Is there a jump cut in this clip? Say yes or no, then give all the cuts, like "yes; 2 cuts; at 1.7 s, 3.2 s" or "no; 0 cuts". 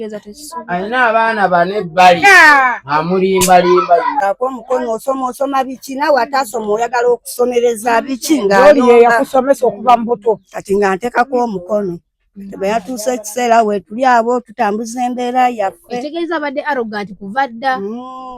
yes; 1 cut; at 4.2 s